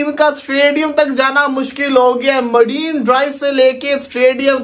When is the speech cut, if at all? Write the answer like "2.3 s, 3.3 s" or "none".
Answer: none